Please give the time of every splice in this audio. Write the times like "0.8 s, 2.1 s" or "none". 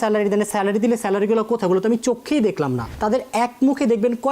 2.9 s

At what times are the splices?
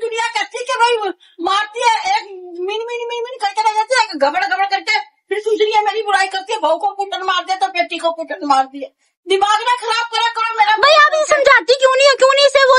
none

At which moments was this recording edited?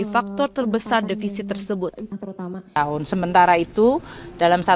2.1 s

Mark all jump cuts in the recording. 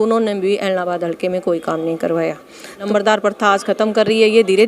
2.9 s

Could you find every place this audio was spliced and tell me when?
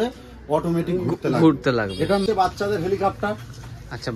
2.2 s

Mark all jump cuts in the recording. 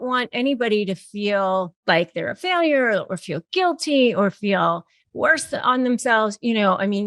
1.7 s

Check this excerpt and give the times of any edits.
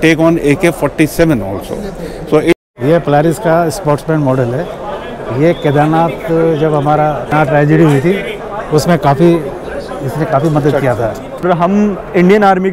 2.6 s, 7.3 s, 11.4 s

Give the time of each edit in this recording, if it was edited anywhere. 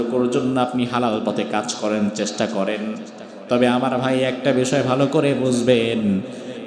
none

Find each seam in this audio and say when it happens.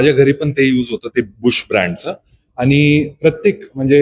none

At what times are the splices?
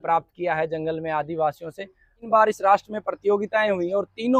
2.2 s

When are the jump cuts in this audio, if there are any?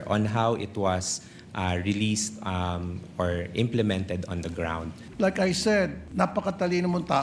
5.0 s, 6.0 s

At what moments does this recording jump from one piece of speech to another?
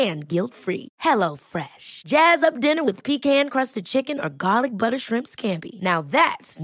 none

